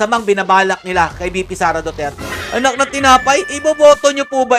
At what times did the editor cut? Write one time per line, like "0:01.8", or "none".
0:02.2